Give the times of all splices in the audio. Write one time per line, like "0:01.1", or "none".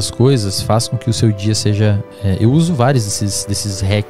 none